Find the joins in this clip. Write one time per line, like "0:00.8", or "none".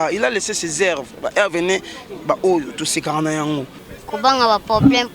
0:03.8

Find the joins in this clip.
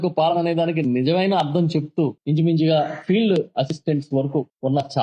0:02.2

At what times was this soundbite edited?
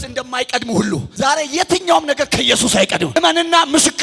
0:01.1
0:03.2

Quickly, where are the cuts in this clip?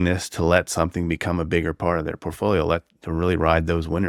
none

